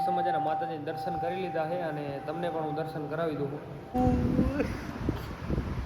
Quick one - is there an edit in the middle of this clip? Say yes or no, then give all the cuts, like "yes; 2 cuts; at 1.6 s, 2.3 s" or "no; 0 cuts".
yes; 1 cut; at 3.9 s